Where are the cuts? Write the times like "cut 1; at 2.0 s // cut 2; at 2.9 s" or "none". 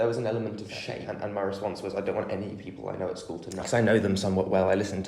cut 1; at 1.1 s // cut 2; at 3.6 s